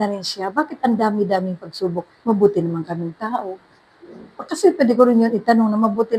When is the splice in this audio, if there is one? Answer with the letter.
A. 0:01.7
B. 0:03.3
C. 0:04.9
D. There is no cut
D